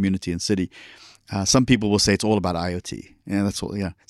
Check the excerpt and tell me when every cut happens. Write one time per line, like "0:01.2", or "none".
none